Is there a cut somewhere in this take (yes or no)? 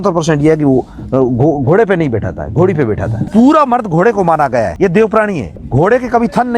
yes